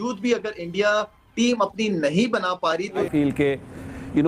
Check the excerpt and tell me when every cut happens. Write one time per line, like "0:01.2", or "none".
0:03.1